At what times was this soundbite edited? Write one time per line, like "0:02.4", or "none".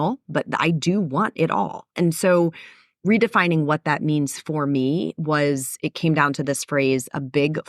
none